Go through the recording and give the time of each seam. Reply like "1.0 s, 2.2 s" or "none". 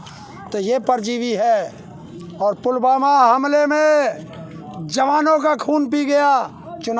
none